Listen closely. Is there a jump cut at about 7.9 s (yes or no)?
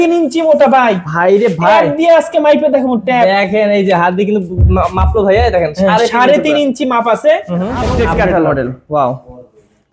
yes